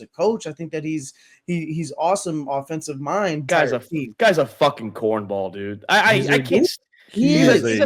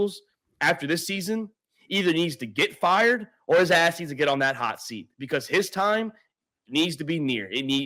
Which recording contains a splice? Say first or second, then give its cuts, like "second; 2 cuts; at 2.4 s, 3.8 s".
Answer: first; 1 cut; at 3.4 s